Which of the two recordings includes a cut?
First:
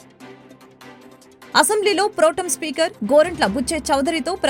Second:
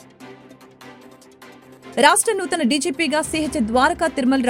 second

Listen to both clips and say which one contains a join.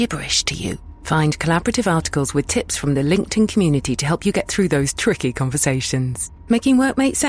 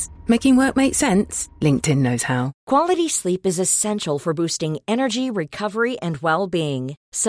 second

